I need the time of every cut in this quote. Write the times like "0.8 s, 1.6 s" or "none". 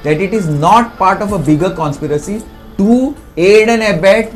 none